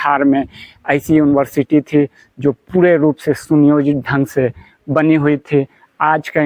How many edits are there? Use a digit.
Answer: 0